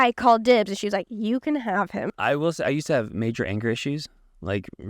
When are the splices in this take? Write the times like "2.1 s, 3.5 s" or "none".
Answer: 2.1 s